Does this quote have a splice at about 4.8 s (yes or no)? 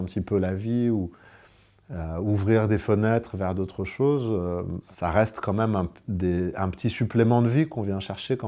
yes